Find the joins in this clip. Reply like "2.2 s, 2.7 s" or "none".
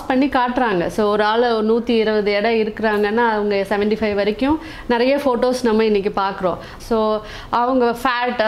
6.7 s